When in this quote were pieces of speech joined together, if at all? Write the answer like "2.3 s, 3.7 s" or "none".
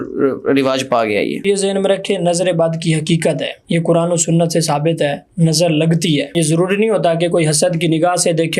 1.4 s, 3.5 s, 6.4 s